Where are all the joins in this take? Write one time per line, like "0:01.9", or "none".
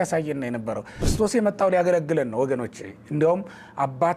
0:01.0